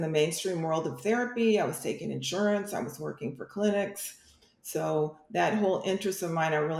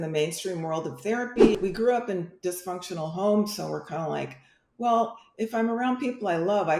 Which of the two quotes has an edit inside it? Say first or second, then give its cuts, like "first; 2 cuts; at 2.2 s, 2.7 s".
second; 1 cut; at 1.6 s